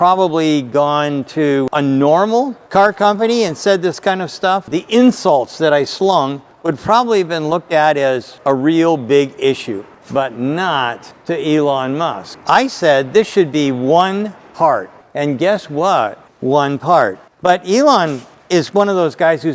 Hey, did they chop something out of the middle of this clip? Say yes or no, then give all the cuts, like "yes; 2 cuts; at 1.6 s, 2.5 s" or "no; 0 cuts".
yes; 6 cuts; at 1.7 s, 2.6 s, 4.7 s, 8.3 s, 9.9 s, 15.0 s